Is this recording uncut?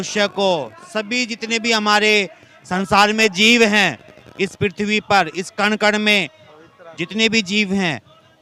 yes; 0 cuts

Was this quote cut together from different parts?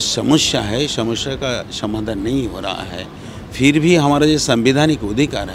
no; 0 cuts

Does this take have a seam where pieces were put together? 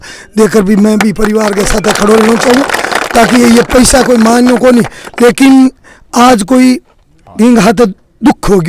no; 0 cuts

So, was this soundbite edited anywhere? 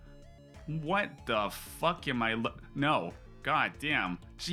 no; 0 cuts

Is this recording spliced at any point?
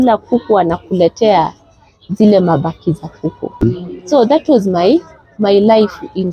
yes; 1 cut; at 3.6 s

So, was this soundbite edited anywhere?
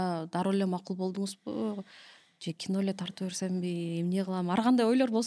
no; 0 cuts

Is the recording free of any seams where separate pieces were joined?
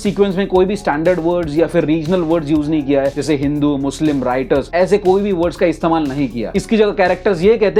yes; 0 cuts

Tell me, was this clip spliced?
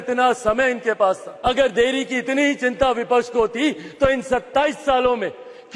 yes; 1 cut; at 1.3 s

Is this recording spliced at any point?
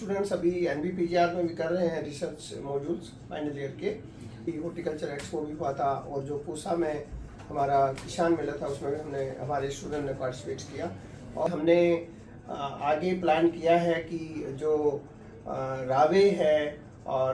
yes; 2 cuts; at 4.4 s, 11.5 s

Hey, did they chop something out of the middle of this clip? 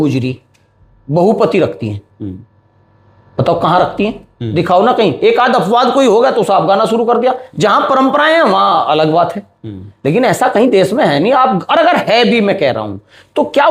no; 0 cuts

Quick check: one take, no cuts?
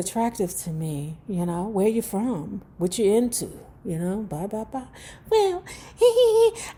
yes; 0 cuts

